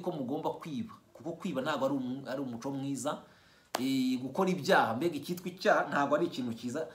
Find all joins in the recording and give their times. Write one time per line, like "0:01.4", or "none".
none